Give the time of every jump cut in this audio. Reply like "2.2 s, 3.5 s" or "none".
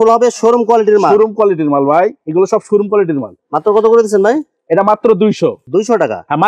none

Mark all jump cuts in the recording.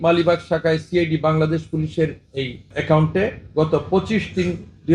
none

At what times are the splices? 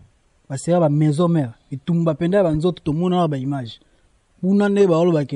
none

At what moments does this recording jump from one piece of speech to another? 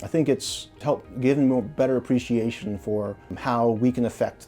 3.3 s

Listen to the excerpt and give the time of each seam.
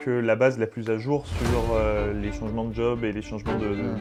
none

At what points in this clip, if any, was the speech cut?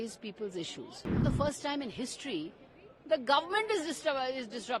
1.2 s

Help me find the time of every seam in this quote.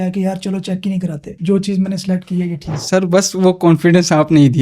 none

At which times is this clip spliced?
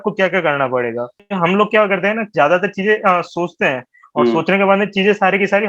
1.2 s

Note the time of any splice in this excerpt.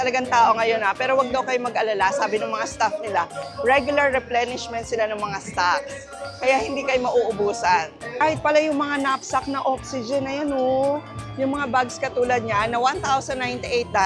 8.0 s

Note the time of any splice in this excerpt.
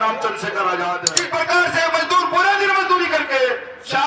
1.1 s

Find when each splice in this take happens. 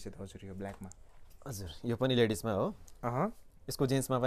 none

